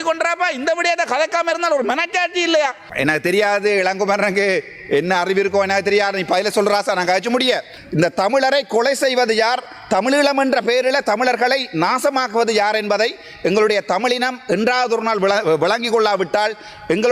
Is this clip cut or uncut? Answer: cut